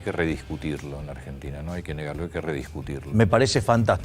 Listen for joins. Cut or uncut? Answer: uncut